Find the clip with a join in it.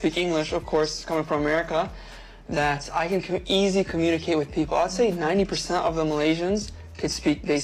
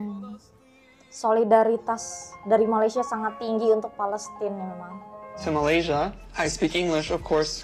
second; 1 cut; at 5.4 s

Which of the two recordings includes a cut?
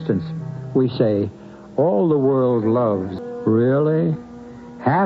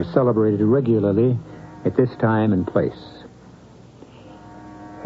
first; 1 cut; at 3.1 s

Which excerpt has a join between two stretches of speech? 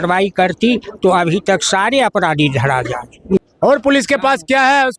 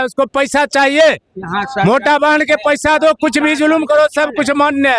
first; 1 cut; at 3.4 s

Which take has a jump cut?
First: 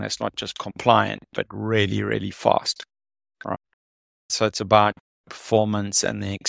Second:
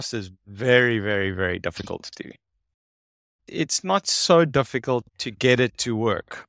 second; 2 cuts; at 3.5 s, 5.1 s

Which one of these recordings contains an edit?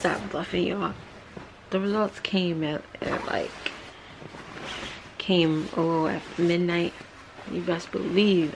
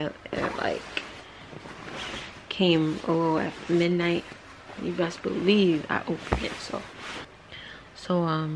second; 1 cut; at 7.2 s

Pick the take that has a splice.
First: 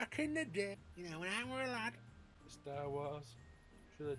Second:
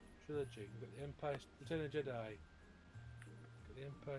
first; 2 cuts; at 0.8 s, 2.5 s

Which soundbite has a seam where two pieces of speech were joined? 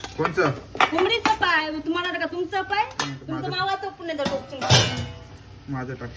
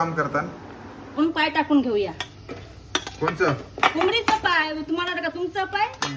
second; 1 cut; at 1.1 s

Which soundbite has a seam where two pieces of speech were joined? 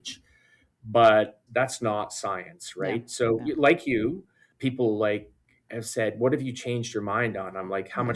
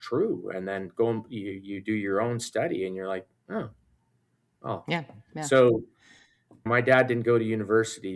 first; 1 cut; at 1.4 s

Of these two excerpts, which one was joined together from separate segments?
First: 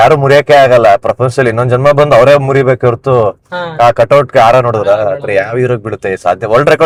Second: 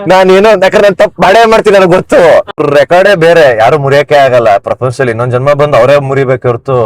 second; 1 cut; at 2.5 s

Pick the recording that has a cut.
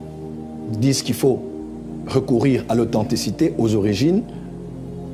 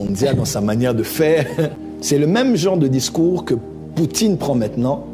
second; 1 cut; at 1.9 s

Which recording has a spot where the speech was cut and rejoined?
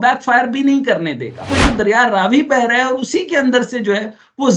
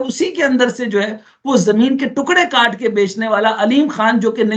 first; 1 cut; at 1.5 s

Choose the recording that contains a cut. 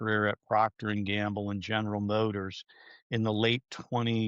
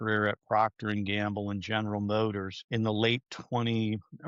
second; 1 cut; at 2.5 s

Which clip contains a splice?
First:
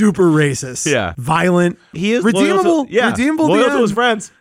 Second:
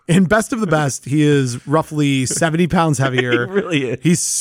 first; 2 cuts; at 1.1 s, 1.9 s

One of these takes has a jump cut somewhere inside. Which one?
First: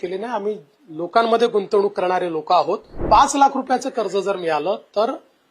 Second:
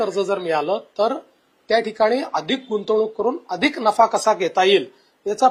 first; 1 cut; at 3.0 s

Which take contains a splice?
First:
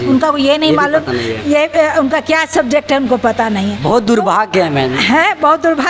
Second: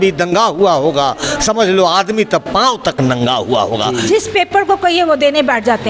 second; 1 cut; at 4.0 s

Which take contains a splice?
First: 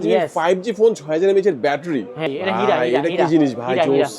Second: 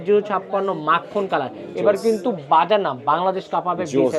first; 1 cut; at 2.3 s

